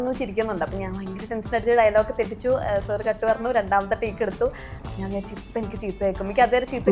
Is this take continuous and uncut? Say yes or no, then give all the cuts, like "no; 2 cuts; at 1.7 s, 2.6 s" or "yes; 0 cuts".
no; 1 cut; at 4.8 s